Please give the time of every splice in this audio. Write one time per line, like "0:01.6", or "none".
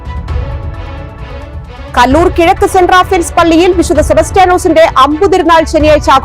0:01.1